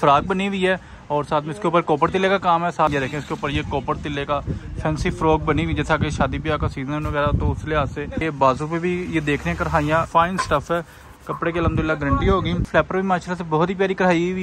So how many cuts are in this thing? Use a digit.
4